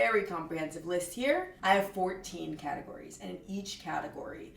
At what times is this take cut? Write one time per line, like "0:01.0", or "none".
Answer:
0:01.5